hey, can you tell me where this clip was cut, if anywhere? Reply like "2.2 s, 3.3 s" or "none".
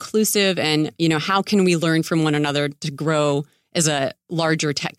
none